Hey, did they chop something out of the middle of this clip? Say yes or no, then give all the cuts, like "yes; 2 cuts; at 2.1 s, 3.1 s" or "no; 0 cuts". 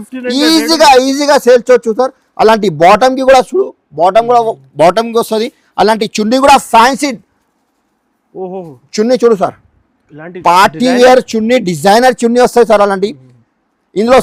no; 0 cuts